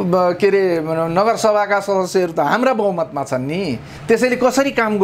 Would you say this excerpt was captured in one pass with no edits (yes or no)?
no